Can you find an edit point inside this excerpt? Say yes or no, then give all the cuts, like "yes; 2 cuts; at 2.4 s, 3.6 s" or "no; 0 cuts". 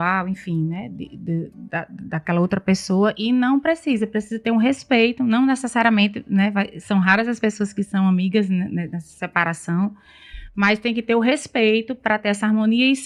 no; 0 cuts